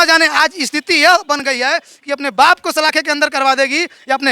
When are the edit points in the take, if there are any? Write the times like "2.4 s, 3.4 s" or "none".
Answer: none